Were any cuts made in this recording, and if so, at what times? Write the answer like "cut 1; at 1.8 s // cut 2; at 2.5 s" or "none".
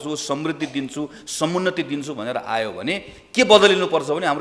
none

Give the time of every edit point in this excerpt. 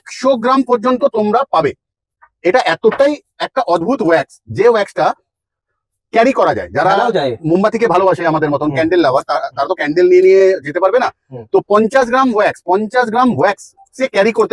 none

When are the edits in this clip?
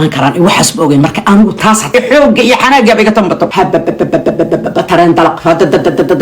cut 1; at 1.9 s

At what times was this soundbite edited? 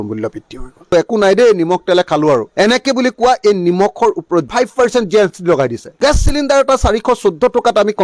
cut 1; at 0.9 s // cut 2; at 4.5 s // cut 3; at 5.9 s

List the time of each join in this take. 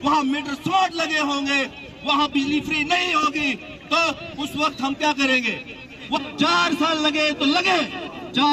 cut 1; at 6.2 s

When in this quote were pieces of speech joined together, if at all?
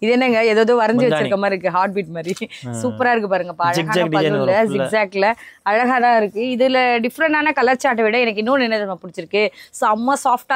none

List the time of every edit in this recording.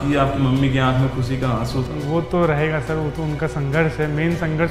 none

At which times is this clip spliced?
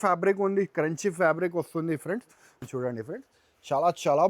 cut 1; at 2.5 s

